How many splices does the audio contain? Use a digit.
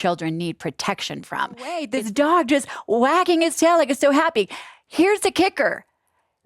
1